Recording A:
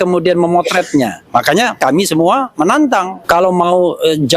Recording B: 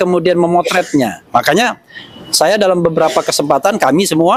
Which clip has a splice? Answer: A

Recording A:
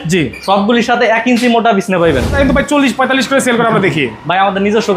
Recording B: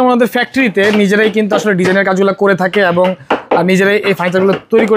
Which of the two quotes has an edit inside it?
A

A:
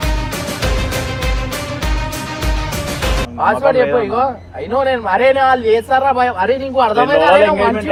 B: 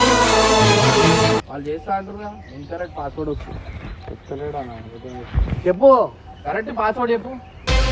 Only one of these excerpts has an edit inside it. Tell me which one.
B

